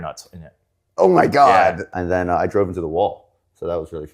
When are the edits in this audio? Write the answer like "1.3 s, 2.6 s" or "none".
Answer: 1.9 s